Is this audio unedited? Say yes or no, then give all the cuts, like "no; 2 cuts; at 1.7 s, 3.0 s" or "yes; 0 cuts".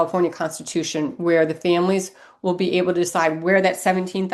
yes; 0 cuts